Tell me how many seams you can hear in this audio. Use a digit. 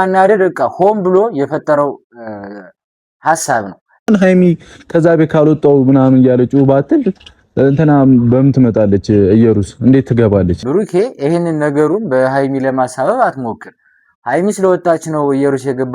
2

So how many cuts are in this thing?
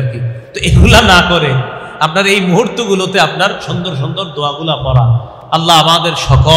0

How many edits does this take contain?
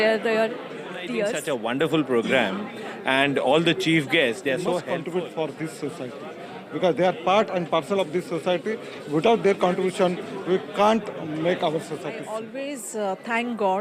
3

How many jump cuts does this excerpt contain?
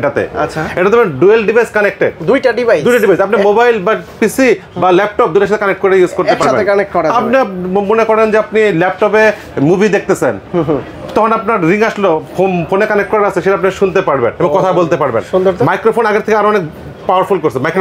0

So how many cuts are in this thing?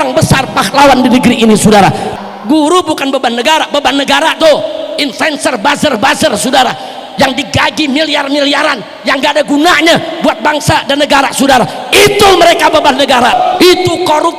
2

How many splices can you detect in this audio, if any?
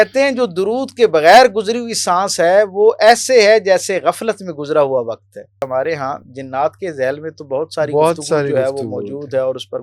1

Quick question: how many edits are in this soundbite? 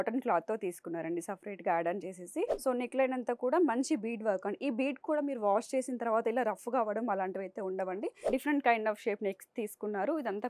2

